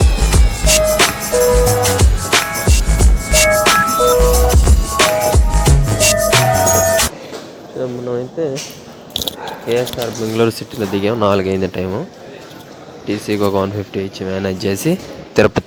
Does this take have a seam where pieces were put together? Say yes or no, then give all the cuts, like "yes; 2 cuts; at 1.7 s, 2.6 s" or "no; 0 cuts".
no; 0 cuts